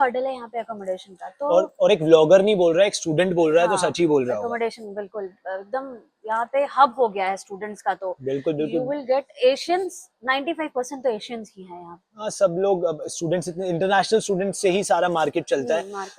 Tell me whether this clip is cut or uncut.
uncut